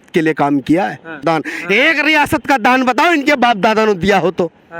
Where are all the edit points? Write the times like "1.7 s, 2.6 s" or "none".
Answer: 1.2 s